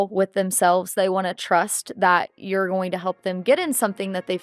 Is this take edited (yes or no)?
no